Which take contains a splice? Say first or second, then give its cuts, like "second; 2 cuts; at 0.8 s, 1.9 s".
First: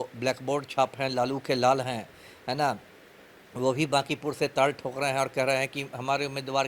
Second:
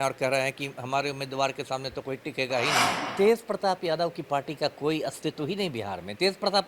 second; 1 cut; at 3.0 s